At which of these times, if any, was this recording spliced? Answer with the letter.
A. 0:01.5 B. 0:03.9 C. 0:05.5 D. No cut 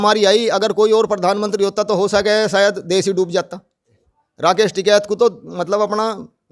B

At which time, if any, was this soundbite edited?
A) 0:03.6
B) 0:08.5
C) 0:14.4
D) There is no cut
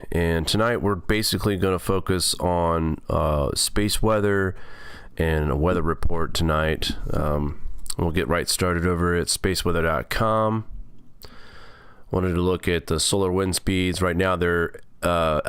B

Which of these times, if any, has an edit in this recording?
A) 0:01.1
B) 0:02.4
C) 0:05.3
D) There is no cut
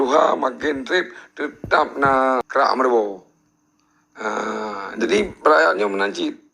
B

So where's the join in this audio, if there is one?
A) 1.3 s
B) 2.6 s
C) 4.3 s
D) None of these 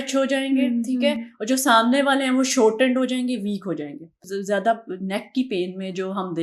C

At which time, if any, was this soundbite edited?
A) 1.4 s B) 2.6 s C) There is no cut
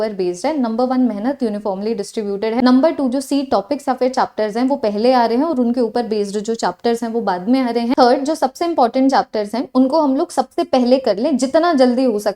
B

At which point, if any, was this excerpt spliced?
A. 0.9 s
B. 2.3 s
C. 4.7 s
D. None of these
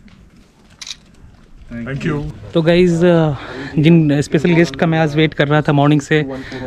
D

